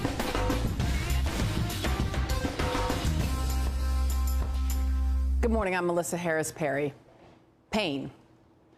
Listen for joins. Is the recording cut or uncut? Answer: cut